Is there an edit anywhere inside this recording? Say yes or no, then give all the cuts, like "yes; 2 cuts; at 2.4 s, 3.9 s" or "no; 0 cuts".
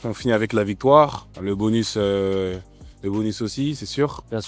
no; 0 cuts